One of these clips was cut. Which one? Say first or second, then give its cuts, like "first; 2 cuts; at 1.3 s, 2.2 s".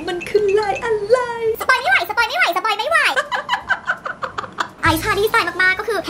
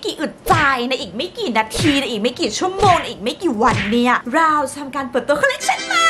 first; 2 cuts; at 1.6 s, 3.2 s